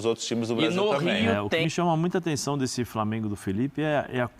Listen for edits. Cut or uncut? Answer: cut